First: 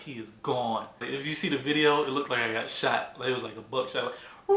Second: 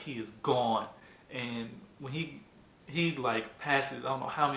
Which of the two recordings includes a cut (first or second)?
first